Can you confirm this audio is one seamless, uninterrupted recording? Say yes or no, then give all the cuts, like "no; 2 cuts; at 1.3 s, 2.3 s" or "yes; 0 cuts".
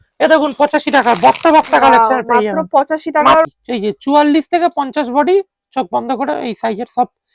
no; 1 cut; at 3.5 s